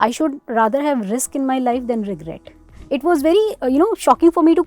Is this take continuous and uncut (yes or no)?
no